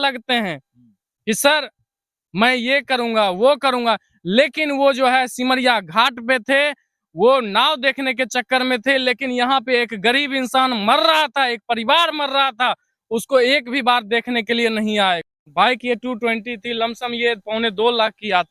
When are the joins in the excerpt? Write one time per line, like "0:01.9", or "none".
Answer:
0:15.3